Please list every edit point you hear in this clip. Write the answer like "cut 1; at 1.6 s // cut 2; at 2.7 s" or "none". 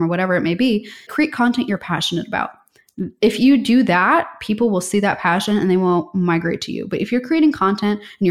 cut 1; at 1.1 s